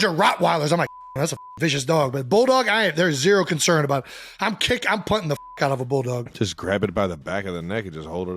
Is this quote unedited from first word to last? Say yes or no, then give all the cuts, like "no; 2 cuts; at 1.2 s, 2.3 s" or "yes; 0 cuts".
no; 1 cut; at 6.3 s